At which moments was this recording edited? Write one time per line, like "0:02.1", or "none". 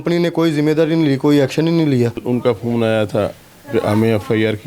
0:02.2